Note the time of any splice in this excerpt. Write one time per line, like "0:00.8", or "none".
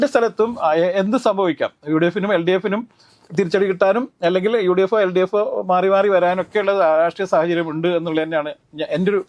none